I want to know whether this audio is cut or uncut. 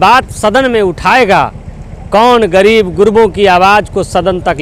uncut